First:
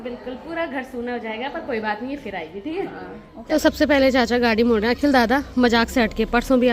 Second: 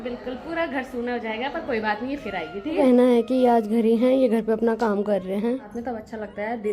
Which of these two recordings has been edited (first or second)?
second